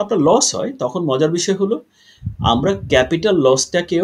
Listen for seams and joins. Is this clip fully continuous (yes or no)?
yes